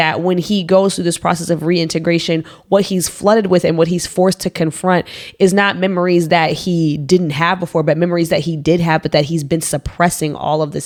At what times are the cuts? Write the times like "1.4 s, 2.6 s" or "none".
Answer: none